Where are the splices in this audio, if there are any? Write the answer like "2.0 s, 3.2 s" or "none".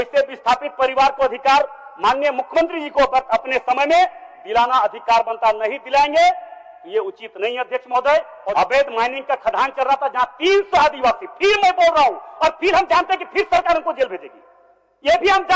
8.4 s